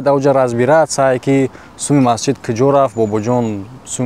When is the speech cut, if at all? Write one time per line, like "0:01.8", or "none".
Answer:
none